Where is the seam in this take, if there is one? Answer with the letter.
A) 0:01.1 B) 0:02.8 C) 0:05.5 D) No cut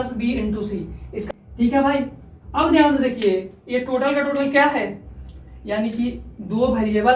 A